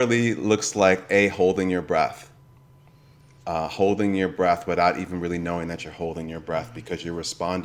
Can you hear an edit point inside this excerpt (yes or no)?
no